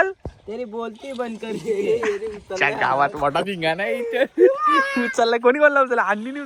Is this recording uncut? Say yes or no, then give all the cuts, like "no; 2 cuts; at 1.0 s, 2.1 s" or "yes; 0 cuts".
yes; 0 cuts